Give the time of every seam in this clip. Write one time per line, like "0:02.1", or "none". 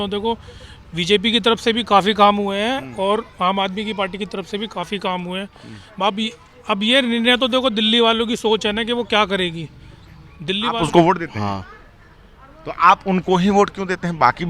0:10.7